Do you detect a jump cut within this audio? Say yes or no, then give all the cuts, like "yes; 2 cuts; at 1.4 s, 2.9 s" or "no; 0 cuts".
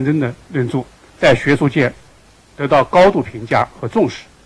yes; 1 cut; at 1.0 s